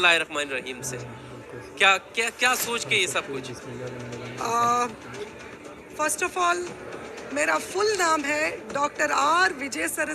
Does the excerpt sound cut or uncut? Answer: uncut